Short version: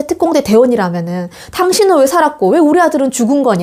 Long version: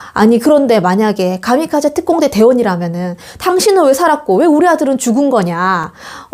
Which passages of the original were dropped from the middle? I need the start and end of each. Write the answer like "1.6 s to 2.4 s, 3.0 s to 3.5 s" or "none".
none

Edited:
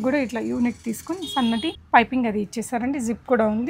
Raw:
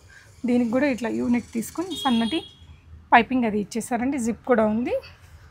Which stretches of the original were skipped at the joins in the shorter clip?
2.5 s to 3.0 s

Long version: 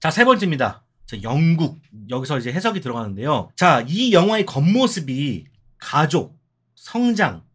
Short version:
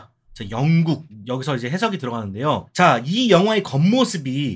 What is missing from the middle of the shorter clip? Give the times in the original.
1.8 s to 1.9 s

